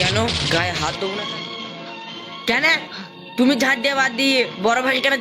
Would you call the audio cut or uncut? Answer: cut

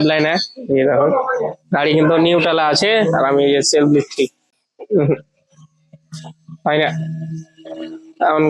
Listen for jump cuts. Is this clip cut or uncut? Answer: uncut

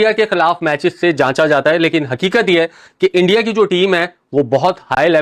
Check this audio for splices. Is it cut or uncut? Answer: uncut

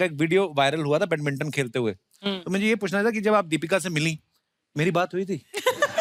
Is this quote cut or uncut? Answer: uncut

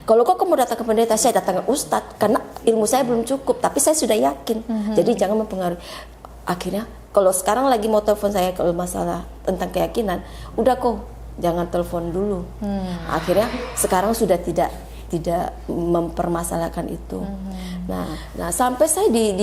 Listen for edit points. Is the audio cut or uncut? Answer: cut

